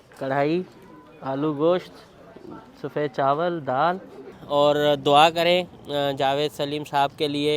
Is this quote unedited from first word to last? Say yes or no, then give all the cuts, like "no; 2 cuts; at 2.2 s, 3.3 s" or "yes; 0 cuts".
no; 1 cut; at 4.4 s